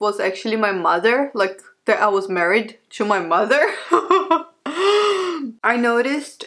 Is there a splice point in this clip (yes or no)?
yes